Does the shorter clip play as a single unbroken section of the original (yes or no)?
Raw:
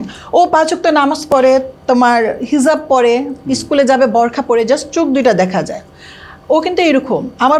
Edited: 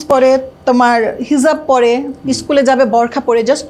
yes